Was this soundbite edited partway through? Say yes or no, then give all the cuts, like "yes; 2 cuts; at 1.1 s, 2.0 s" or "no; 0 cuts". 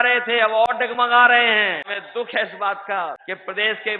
yes; 2 cuts; at 1.9 s, 3.2 s